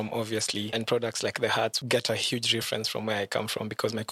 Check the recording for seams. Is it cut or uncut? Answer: cut